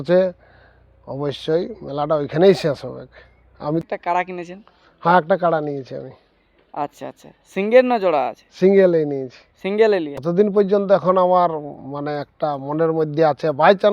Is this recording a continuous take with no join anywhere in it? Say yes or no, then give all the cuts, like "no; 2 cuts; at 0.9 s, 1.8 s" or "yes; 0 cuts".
no; 2 cuts; at 3.8 s, 10.2 s